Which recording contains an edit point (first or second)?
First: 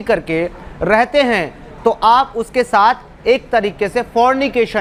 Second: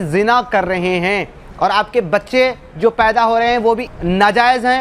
second